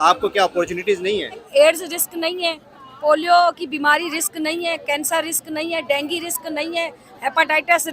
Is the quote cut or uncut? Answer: cut